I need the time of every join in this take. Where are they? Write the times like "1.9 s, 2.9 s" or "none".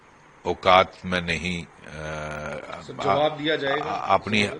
none

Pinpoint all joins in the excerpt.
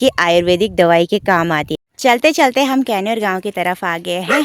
1.7 s

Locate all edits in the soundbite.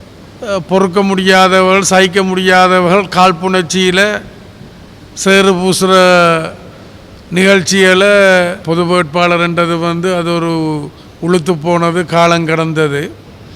8.6 s

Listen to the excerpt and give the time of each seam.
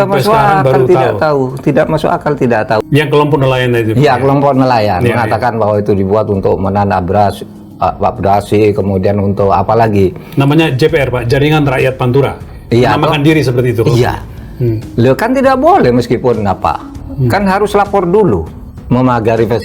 2.8 s

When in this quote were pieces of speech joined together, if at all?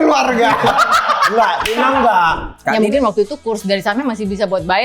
2.8 s

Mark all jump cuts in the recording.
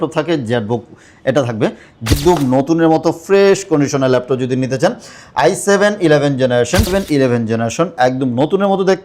2.1 s, 6.9 s

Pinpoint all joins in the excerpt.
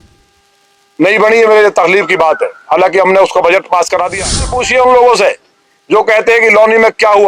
4.6 s

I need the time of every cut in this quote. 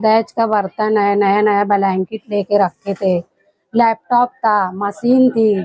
none

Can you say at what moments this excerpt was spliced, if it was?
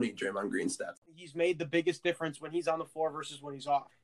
1.1 s

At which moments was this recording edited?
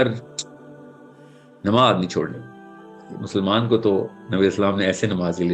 2.9 s

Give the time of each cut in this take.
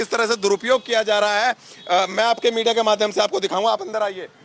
none

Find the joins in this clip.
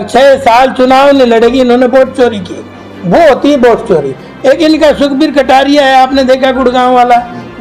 none

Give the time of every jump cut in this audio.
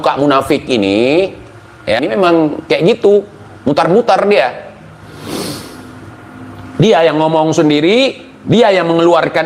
2.0 s

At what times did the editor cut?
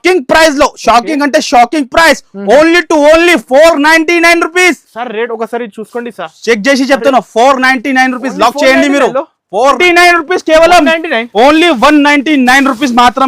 9.8 s

